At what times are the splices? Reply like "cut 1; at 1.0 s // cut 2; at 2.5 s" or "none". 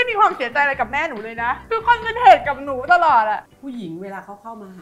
cut 1; at 1.6 s // cut 2; at 3.4 s